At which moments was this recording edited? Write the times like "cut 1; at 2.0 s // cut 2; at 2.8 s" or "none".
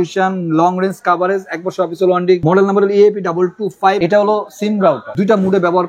cut 1; at 2.4 s // cut 2; at 4.0 s // cut 3; at 5.1 s

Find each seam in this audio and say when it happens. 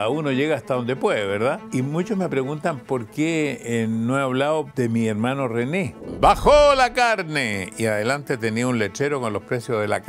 cut 1; at 1.6 s // cut 2; at 4.7 s // cut 3; at 6.1 s

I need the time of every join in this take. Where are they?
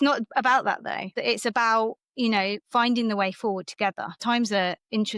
cut 1; at 1.1 s // cut 2; at 4.2 s

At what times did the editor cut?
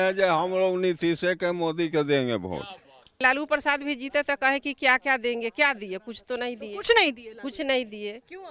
cut 1; at 3.2 s

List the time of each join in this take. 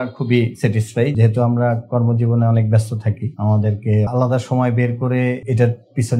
cut 1; at 1.1 s

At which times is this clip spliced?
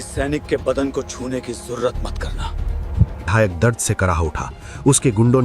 cut 1; at 3.3 s

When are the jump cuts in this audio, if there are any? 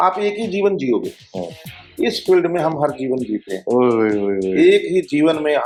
none

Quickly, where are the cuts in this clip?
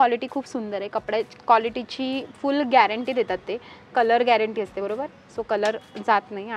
none

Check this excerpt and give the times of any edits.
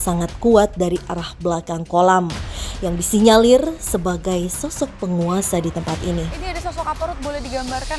none

